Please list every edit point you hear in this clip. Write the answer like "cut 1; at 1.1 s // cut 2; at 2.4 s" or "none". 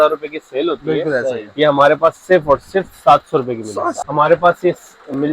cut 1; at 4.0 s